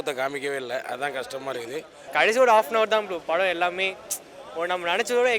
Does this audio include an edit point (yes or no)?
yes